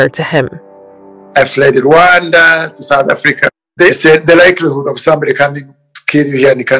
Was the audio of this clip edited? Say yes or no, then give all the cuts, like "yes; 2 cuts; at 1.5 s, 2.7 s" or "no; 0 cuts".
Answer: yes; 1 cut; at 3.4 s